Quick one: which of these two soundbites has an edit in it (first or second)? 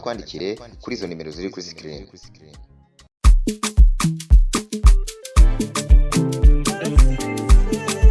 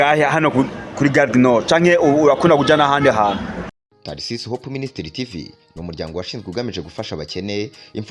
second